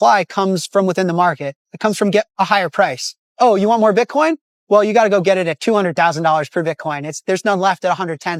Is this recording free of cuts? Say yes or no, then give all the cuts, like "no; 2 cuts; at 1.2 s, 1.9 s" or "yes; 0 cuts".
yes; 0 cuts